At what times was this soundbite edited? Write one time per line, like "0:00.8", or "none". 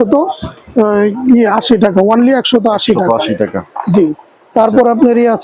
none